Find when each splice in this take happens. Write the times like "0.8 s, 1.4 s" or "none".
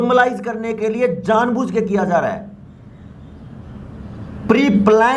none